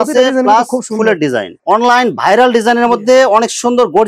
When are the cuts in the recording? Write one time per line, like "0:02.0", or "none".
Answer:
0:01.6